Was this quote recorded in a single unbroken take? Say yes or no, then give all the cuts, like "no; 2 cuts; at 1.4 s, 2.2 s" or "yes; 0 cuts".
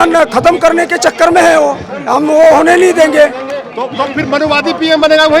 yes; 0 cuts